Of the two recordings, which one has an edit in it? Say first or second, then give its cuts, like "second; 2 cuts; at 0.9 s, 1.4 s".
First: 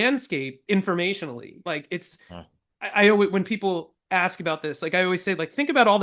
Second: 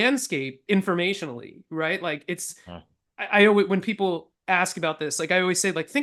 first; 1 cut; at 1.6 s